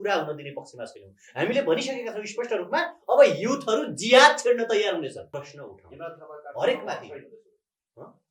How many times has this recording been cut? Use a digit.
1